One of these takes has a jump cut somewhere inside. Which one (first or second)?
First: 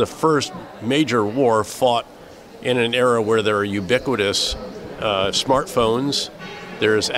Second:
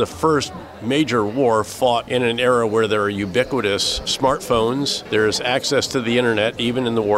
second